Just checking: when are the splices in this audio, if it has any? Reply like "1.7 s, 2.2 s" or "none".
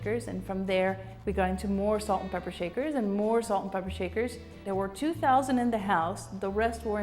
4.5 s